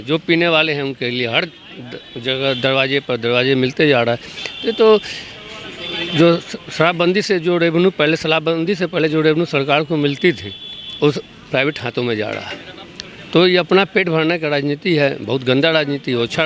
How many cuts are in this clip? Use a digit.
0